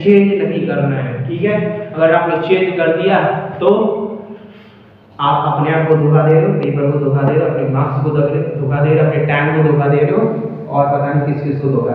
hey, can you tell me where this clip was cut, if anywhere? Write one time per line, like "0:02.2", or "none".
none